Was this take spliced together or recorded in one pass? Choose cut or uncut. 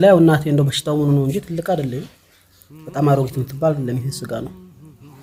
uncut